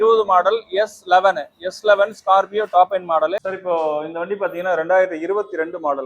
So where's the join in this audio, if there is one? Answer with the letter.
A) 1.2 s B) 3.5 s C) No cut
B